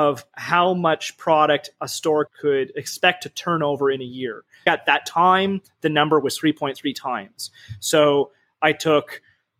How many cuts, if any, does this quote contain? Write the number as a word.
two